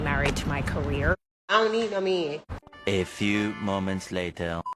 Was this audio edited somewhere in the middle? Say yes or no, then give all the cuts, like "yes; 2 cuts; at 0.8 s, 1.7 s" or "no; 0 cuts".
yes; 2 cuts; at 1.1 s, 2.7 s